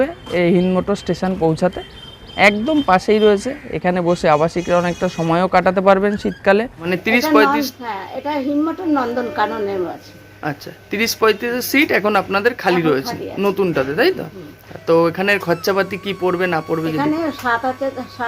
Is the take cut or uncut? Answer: cut